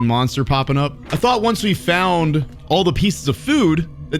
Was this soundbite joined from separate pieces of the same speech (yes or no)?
yes